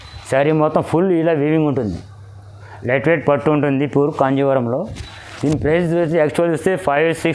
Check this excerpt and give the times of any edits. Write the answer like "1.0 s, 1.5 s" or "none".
none

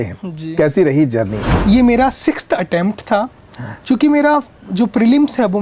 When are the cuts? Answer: 1.5 s

